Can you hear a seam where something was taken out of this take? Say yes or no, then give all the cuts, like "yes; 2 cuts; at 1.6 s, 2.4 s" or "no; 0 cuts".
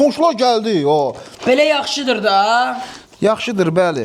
yes; 1 cut; at 1.3 s